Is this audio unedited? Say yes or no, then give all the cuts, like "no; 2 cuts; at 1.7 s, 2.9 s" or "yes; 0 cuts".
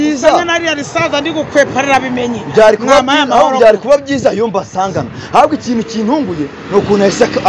yes; 0 cuts